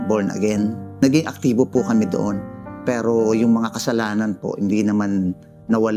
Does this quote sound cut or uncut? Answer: uncut